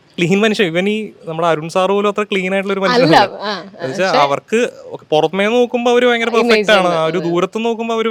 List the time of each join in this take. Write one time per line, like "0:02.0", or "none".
none